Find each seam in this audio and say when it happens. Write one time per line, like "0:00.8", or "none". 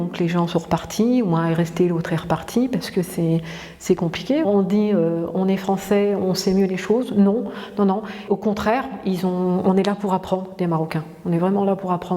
0:04.4
0:08.3

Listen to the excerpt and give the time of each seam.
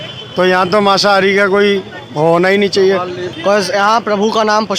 0:03.2

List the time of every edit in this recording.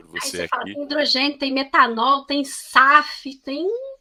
none

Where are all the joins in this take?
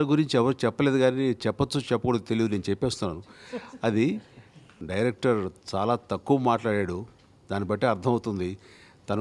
0:04.7

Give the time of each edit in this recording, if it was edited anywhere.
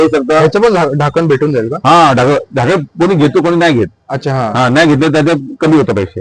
none

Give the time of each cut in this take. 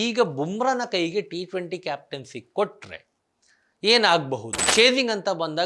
0:04.6

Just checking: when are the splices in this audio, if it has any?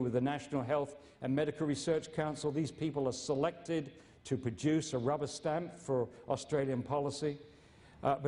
0:03.0

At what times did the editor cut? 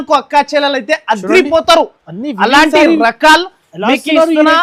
none

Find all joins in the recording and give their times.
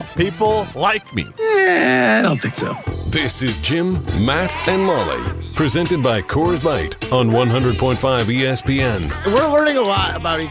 0:09.1

